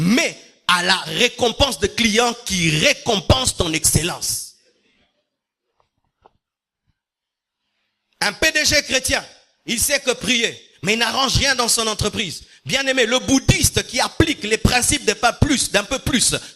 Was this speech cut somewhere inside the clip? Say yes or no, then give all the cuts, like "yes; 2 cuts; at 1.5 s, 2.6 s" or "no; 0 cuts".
no; 0 cuts